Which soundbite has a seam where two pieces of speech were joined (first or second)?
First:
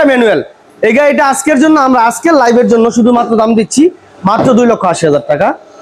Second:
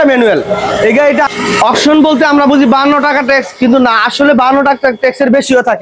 second